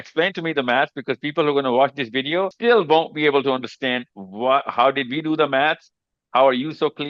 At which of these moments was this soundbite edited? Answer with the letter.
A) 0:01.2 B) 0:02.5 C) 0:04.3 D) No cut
B